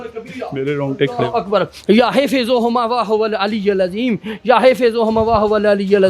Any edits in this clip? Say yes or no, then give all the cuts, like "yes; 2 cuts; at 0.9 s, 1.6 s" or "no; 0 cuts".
no; 0 cuts